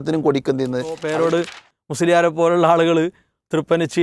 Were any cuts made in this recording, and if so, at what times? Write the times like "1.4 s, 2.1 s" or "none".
1.0 s

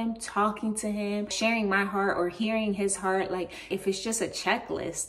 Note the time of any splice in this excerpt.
1.3 s, 3.7 s

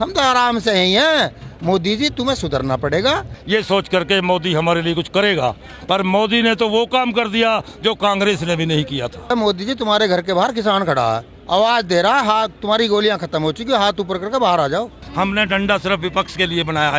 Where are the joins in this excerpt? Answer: 3.4 s, 9.3 s, 11.3 s, 15.0 s

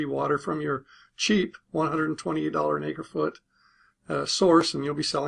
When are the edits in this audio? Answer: 4.0 s

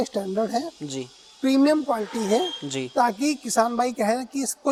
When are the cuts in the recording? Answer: none

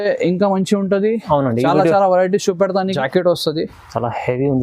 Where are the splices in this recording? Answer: 2.9 s

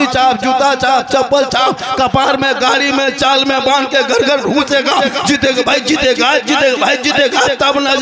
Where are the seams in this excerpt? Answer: none

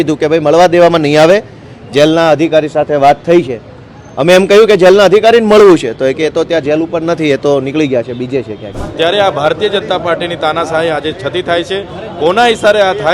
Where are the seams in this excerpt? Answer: 8.8 s

